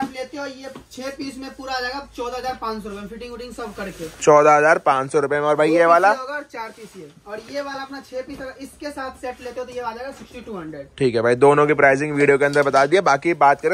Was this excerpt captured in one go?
yes; 0 cuts

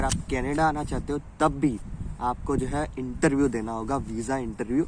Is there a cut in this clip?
no; 0 cuts

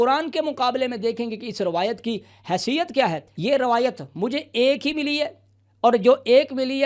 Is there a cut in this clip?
yes; 1 cut; at 3.3 s

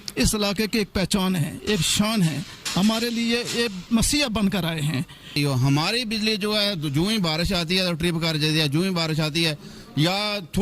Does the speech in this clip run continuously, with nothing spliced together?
no; 1 cut; at 5.3 s

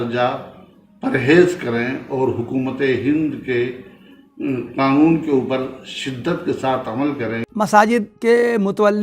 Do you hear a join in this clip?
yes; 2 cuts; at 7.4 s, 8.1 s

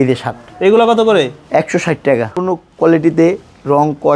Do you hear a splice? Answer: yes; 1 cut; at 2.3 s

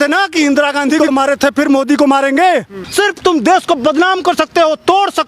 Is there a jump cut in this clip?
yes; 1 cut; at 2.8 s

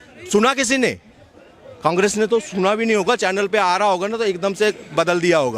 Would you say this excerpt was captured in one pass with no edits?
yes; 0 cuts

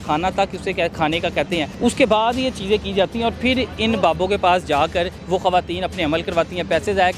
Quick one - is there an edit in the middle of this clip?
yes; 2 cuts; at 1.7 s, 5.2 s

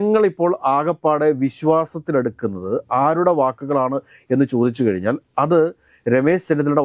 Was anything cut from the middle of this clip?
no; 0 cuts

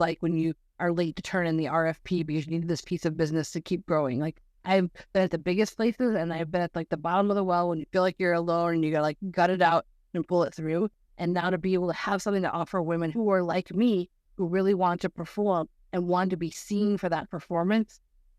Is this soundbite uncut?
no; 1 cut; at 13.1 s

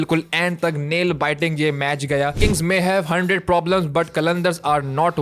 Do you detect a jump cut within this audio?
yes; 1 cut; at 2.4 s

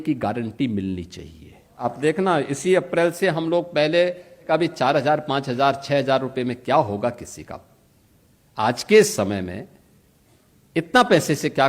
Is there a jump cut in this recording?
yes; 2 cuts; at 1.8 s, 4.5 s

